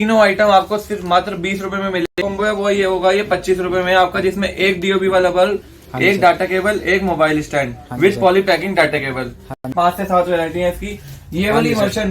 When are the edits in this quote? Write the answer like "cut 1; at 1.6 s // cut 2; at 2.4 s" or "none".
cut 1; at 2.2 s // cut 2; at 9.7 s

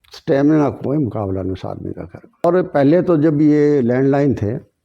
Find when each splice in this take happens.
cut 1; at 2.4 s

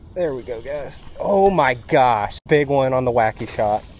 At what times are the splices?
cut 1; at 2.3 s

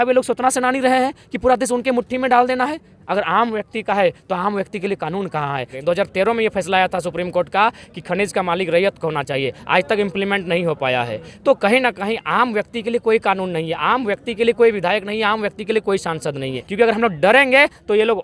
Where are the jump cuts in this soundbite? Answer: cut 1; at 5.7 s // cut 2; at 16.6 s

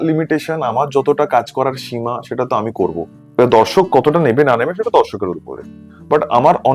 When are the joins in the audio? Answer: none

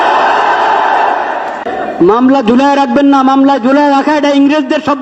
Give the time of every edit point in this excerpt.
cut 1; at 1.7 s

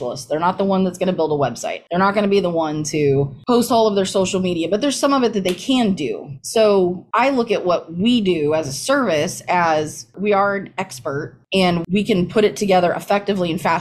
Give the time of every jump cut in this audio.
none

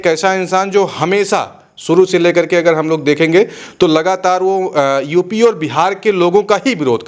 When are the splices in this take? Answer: none

